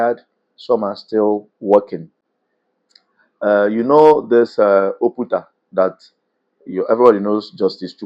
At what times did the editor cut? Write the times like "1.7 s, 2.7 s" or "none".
none

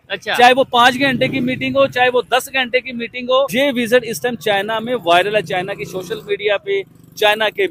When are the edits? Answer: 3.5 s

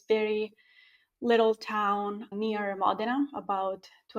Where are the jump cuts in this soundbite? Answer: none

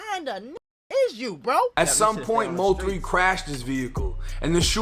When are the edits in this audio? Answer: 1.7 s

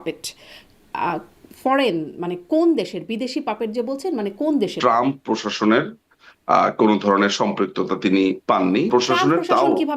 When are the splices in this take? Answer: 4.8 s, 8.9 s

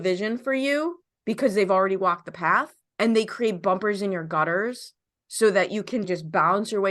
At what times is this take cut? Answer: 2.8 s, 6.1 s

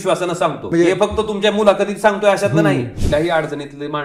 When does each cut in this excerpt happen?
3.0 s

